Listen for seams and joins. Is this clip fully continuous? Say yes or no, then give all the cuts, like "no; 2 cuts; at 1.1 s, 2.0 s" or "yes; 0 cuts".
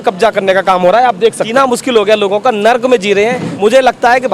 no; 2 cuts; at 1.4 s, 3.5 s